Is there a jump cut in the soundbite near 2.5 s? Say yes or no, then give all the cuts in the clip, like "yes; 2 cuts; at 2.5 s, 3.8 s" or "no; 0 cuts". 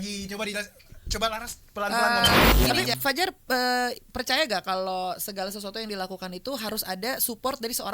yes; 1 cut; at 2.5 s